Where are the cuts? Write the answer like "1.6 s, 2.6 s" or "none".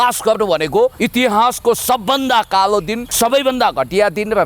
1.0 s, 3.0 s